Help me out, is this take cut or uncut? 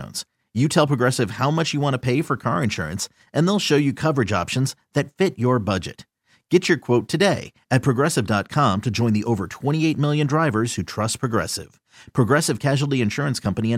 uncut